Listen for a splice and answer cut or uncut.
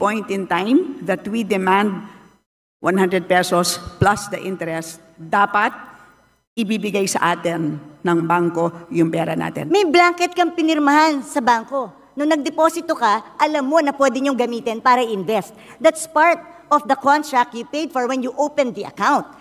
cut